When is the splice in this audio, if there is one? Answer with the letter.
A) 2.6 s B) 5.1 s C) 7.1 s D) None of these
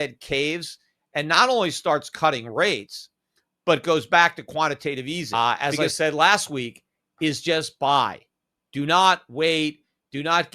B